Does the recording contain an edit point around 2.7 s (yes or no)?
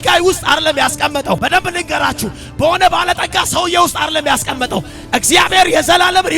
no